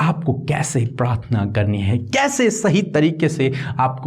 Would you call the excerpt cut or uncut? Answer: uncut